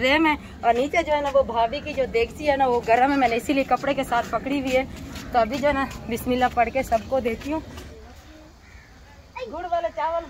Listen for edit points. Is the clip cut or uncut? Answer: uncut